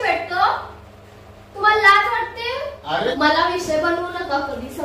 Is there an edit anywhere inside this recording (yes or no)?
yes